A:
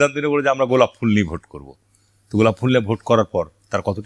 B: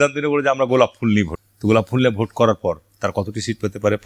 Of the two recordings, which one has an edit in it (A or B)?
B